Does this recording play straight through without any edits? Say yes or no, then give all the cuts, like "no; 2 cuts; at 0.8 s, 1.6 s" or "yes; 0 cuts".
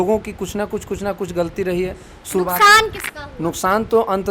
yes; 0 cuts